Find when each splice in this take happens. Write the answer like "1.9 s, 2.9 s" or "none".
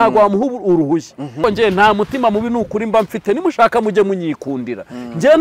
1.4 s